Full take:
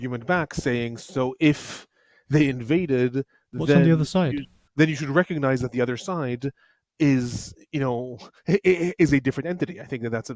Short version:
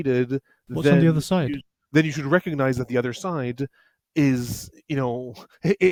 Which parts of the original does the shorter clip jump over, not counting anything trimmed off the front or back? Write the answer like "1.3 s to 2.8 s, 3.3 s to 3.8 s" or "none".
none